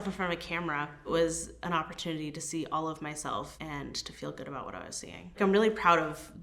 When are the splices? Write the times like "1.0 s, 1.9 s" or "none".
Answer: 1.1 s, 5.3 s